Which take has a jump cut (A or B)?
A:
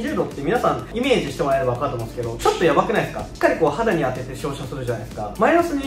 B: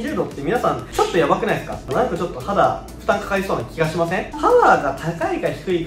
B